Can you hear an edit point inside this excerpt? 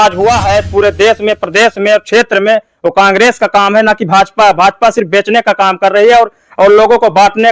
no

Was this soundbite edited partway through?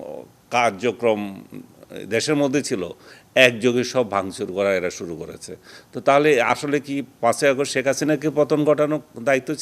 no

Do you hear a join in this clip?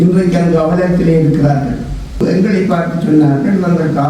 yes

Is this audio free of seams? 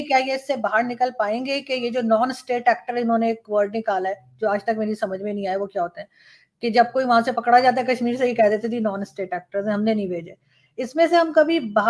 yes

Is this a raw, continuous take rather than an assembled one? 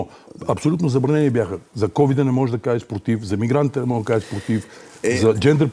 yes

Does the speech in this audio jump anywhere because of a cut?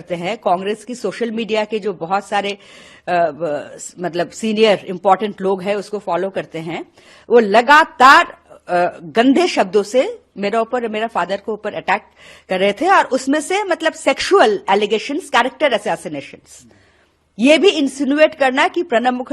no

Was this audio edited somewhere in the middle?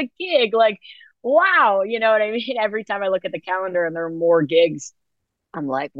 no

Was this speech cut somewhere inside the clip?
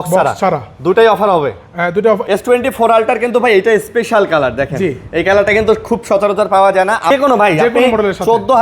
yes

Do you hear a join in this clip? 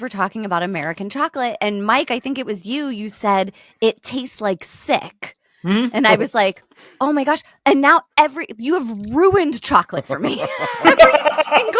no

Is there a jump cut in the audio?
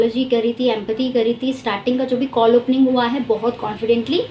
no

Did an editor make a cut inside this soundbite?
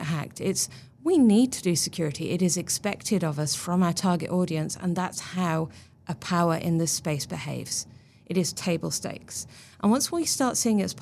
no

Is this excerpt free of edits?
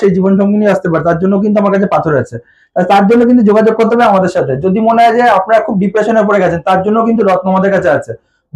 yes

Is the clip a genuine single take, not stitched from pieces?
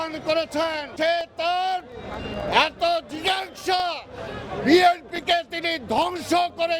no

